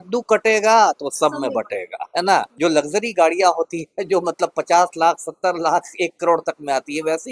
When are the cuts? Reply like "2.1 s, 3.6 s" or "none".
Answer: 2.5 s